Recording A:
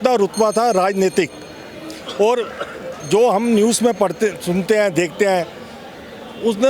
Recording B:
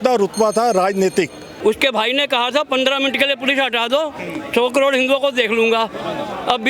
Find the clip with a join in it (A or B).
B